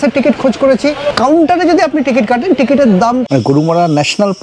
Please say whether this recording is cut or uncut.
cut